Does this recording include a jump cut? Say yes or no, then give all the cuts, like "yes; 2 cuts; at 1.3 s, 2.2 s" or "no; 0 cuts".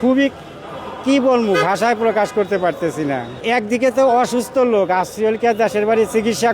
yes; 1 cut; at 3.4 s